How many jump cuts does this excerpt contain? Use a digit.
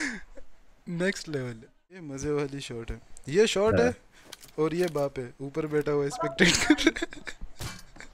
1